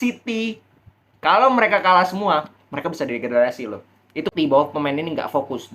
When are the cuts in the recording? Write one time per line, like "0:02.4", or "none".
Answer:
0:04.3